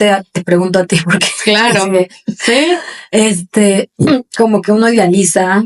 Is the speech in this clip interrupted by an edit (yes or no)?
no